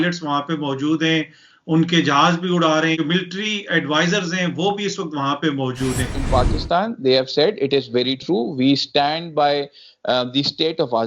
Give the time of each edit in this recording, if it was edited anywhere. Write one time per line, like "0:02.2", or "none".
0:03.0
0:06.2